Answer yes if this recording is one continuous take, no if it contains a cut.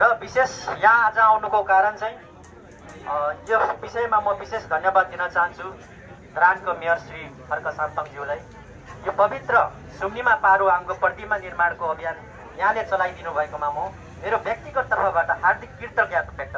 yes